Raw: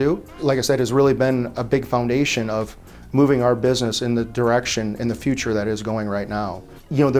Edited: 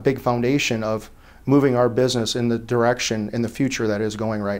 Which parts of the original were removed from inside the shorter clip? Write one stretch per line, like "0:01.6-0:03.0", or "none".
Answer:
none